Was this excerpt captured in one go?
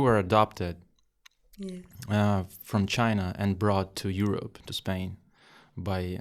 yes; 0 cuts

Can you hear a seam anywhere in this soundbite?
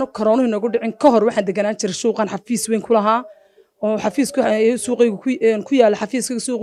no; 0 cuts

